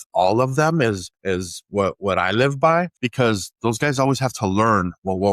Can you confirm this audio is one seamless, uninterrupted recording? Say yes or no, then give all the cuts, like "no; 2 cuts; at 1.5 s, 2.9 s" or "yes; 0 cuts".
no; 2 cuts; at 1.1 s, 3.0 s